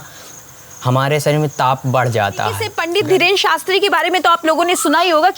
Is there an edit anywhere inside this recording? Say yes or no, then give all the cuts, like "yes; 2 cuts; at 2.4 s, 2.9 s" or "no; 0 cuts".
yes; 1 cut; at 2.7 s